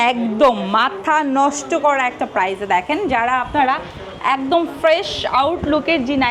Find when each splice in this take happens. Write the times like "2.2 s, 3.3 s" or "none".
none